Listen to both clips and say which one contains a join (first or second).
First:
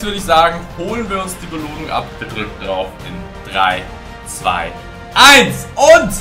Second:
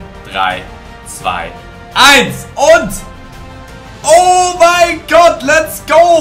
first